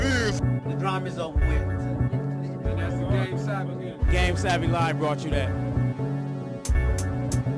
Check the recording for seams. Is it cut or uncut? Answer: cut